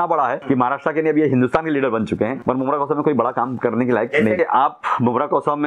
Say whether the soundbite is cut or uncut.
cut